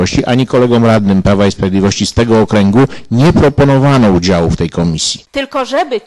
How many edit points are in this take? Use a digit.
1